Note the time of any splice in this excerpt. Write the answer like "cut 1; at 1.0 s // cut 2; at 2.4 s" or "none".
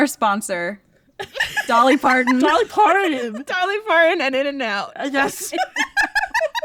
none